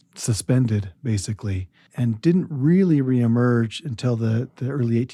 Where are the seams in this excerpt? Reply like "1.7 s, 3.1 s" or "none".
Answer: none